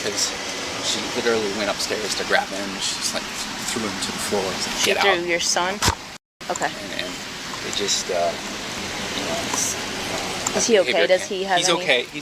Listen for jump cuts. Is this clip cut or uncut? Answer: uncut